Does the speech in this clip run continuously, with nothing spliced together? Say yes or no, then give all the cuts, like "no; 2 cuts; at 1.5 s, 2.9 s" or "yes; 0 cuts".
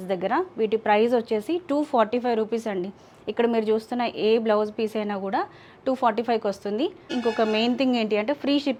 yes; 0 cuts